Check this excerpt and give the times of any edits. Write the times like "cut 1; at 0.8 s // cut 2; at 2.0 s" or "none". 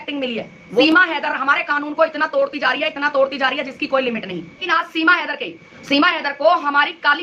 cut 1; at 0.8 s // cut 2; at 4.6 s